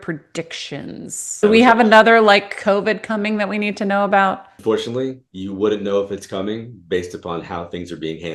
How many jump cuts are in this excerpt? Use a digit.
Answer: 2